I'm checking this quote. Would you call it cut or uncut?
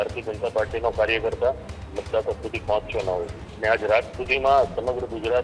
cut